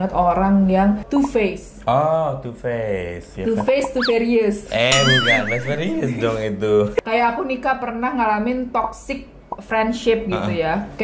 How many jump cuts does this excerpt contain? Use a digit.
2